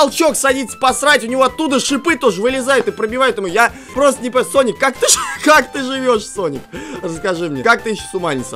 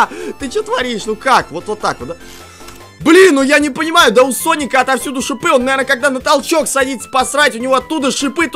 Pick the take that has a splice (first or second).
first